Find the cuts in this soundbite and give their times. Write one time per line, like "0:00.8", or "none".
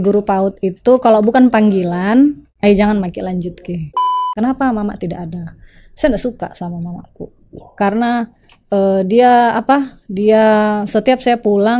0:02.5
0:04.1